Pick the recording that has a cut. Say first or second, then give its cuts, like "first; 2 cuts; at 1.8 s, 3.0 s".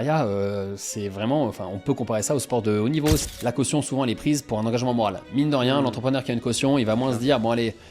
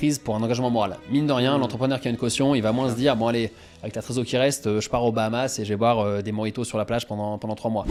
first; 1 cut; at 3.3 s